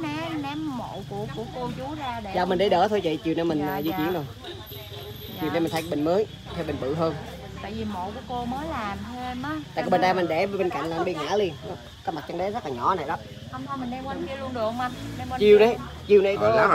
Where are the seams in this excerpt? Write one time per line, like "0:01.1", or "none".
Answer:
none